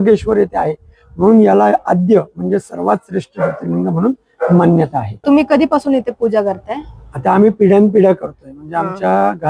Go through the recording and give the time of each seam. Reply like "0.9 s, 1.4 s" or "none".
5.2 s

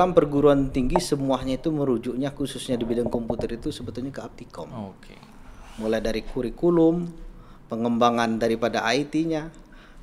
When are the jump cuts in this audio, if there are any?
none

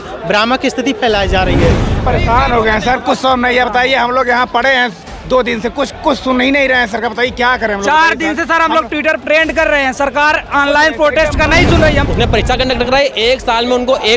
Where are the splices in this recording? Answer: 2.0 s, 12.1 s

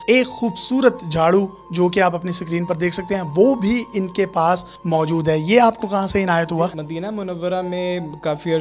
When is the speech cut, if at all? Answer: none

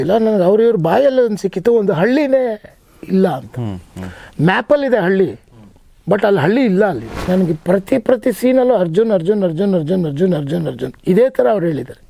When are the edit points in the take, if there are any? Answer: 7.2 s, 10.9 s

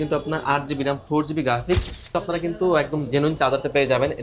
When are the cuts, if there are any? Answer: 2.0 s

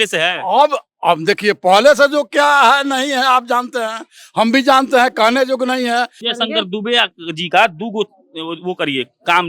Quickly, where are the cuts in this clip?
6.2 s

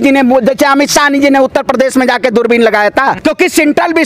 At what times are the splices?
3.2 s

